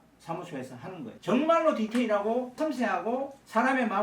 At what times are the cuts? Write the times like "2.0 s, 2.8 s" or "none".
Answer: 1.2 s, 2.8 s